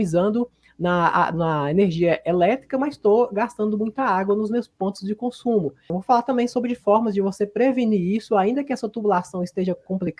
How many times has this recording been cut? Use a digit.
1